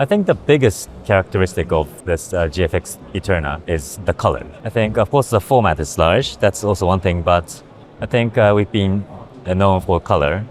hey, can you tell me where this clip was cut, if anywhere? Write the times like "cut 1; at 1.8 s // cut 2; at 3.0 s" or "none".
cut 1; at 0.9 s // cut 2; at 2.0 s // cut 3; at 3.6 s // cut 4; at 4.5 s